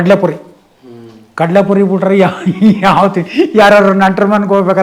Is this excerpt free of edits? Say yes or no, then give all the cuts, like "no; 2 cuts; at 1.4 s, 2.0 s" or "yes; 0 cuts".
yes; 0 cuts